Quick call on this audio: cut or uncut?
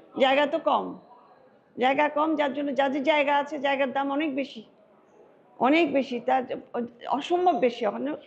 uncut